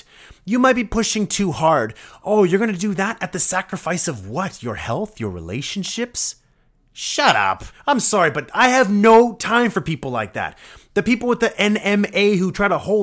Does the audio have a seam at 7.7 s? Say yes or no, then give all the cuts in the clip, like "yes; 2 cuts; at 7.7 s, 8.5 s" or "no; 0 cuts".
yes; 1 cut; at 7.7 s